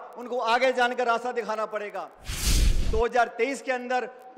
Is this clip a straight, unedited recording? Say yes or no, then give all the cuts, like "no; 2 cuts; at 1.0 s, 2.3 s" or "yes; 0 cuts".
no; 1 cut; at 2.5 s